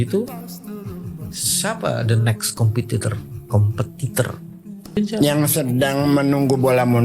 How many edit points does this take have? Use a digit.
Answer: 1